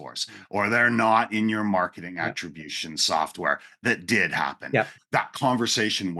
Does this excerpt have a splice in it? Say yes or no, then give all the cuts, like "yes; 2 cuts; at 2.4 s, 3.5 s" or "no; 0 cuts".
yes; 1 cut; at 5.0 s